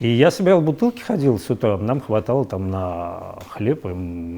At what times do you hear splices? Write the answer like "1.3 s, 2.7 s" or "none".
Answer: none